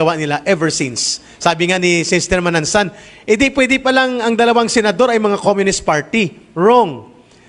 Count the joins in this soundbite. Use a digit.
0